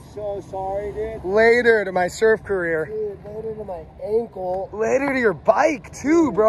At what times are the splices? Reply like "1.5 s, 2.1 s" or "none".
none